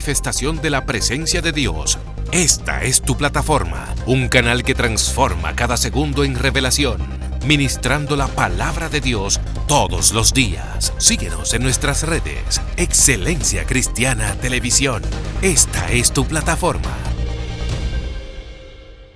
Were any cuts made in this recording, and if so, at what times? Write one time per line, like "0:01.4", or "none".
none